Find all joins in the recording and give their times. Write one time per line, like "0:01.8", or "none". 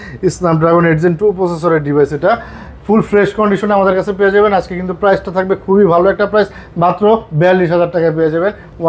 none